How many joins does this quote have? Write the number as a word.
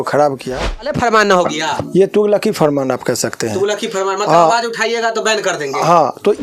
one